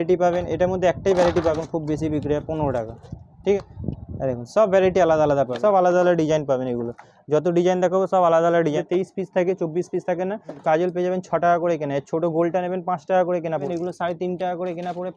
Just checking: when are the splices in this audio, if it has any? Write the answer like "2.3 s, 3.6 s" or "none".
1.6 s, 3.6 s, 5.5 s, 8.8 s, 10.5 s, 13.7 s